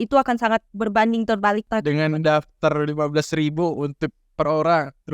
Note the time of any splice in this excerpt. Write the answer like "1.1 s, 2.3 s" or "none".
1.7 s